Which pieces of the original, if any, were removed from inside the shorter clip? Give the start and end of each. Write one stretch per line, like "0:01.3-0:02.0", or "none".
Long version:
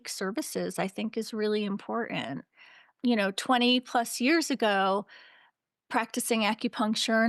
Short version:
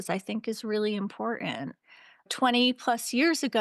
0:03.0-0:03.4